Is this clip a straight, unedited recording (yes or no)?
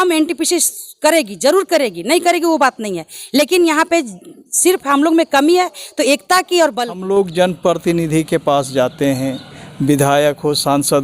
no